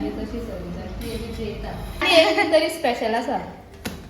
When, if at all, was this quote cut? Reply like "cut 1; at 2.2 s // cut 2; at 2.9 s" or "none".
cut 1; at 2.0 s

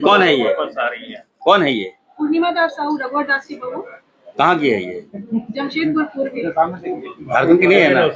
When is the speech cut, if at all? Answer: none

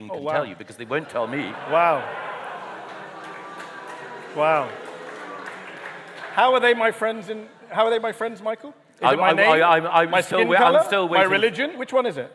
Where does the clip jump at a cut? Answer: none

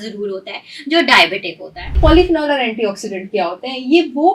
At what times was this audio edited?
cut 1; at 2.0 s

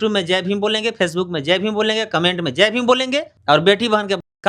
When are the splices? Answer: cut 1; at 3.3 s

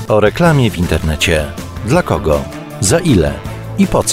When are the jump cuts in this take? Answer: none

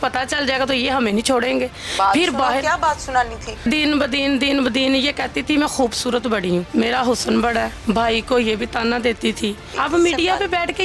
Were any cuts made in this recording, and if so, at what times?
cut 1; at 3.6 s // cut 2; at 6.7 s // cut 3; at 7.7 s // cut 4; at 9.7 s

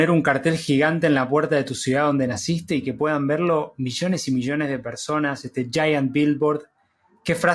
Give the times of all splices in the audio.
none

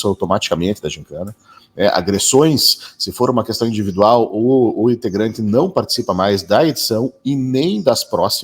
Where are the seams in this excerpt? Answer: none

